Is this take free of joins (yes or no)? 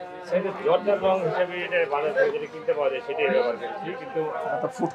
yes